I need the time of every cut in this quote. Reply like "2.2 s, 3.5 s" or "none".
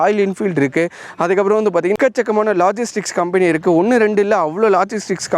2.1 s